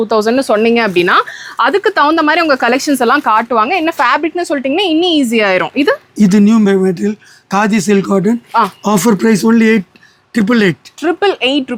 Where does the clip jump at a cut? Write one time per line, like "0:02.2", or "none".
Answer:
none